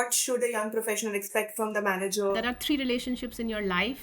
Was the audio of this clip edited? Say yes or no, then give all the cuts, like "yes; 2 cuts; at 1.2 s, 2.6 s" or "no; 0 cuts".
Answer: yes; 1 cut; at 2.4 s